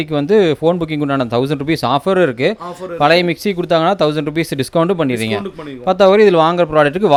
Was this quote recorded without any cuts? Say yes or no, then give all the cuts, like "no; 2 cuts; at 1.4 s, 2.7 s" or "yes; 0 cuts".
yes; 0 cuts